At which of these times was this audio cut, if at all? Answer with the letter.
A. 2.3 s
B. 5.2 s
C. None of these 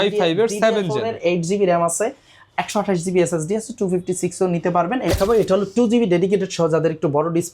B